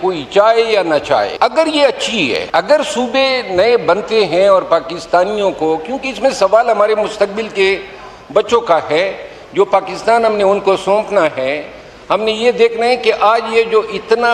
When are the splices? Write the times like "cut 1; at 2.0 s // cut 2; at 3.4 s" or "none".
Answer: cut 1; at 1.3 s // cut 2; at 2.4 s